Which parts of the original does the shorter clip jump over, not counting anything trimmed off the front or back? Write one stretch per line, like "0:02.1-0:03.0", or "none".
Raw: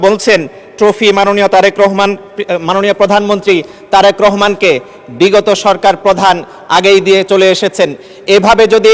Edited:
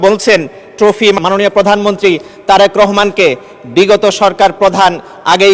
0:01.2-0:02.6